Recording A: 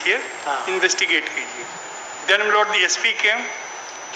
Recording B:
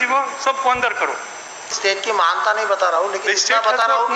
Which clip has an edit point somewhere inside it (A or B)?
B